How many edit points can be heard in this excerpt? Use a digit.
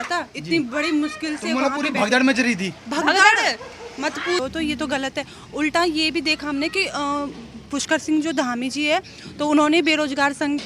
1